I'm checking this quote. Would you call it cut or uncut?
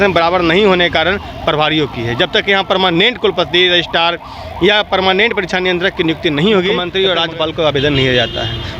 cut